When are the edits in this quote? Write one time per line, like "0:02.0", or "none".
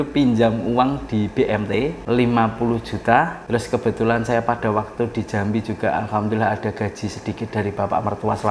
0:02.0
0:03.4